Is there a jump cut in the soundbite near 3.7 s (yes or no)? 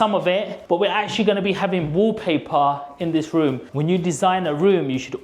yes